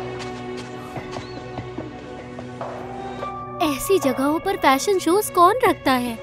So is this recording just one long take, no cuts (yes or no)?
no